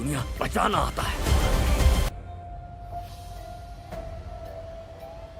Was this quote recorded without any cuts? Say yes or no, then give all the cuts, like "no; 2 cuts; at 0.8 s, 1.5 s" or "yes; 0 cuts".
no; 1 cut; at 2.1 s